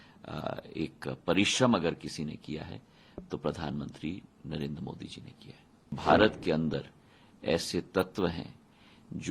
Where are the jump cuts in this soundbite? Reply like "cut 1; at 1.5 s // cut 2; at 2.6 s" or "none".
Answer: cut 1; at 5.9 s